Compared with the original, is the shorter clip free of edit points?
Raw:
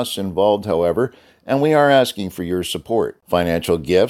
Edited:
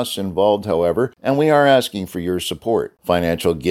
no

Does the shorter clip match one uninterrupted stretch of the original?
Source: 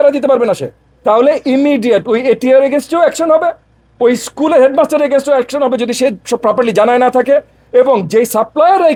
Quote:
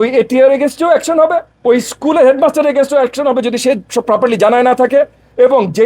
no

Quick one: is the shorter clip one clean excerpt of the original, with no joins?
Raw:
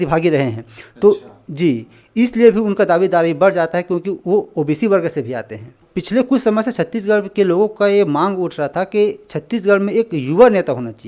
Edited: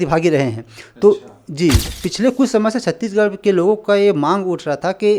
no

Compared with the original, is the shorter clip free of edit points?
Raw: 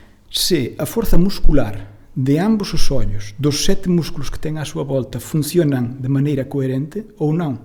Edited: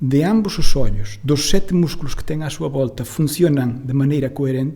yes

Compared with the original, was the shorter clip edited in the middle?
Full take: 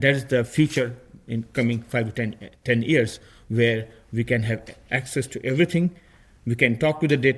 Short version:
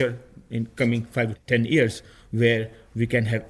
yes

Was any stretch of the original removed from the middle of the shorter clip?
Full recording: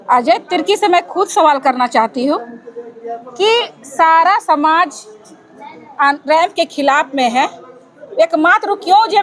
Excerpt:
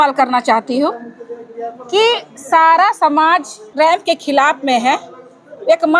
yes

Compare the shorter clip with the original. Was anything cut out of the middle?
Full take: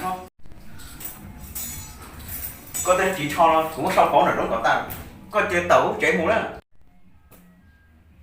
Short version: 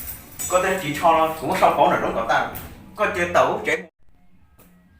yes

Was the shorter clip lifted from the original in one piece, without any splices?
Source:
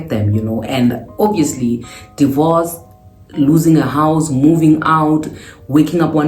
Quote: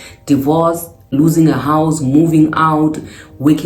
no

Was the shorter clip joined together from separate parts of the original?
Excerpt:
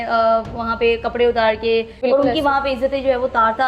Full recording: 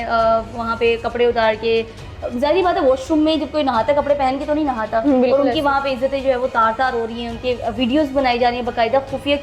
yes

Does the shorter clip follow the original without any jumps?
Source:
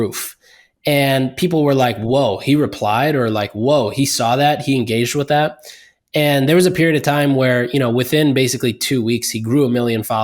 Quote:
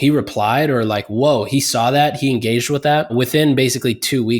no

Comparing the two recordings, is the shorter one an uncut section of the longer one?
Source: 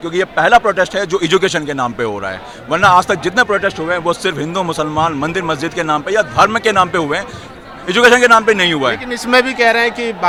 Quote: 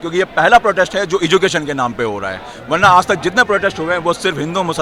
yes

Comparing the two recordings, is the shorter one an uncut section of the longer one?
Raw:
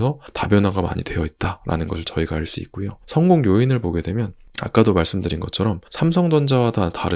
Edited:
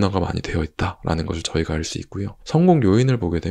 yes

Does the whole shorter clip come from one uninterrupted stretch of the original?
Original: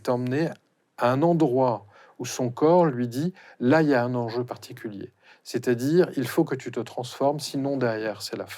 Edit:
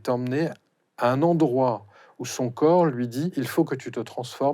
no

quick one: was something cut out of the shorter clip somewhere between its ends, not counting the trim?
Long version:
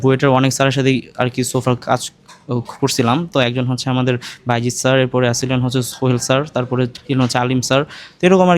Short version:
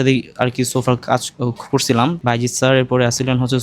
yes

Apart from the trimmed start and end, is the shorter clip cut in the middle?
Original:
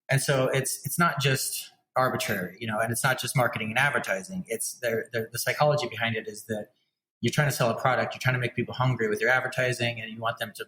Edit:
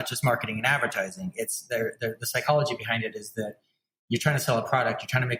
no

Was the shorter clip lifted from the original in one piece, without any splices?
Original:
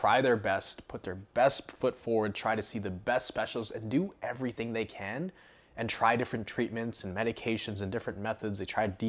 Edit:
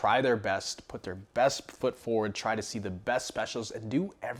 yes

